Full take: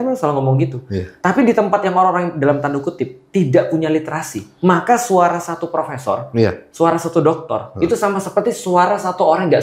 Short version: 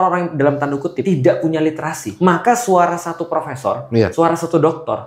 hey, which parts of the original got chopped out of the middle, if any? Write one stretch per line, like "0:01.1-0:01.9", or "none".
0:03.0-0:03.3
0:04.3-0:04.4
0:06.5-0:06.7